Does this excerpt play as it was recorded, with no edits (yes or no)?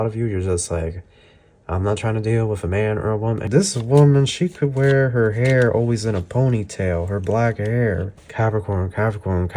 no